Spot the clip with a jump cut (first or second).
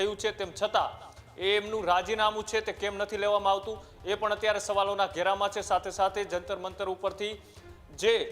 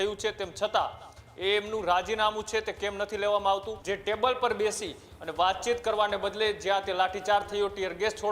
second